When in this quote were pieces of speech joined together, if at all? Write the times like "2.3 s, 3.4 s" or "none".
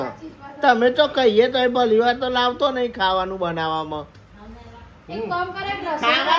none